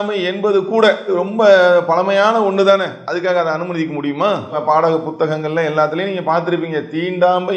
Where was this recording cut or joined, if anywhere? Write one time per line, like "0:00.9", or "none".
0:04.6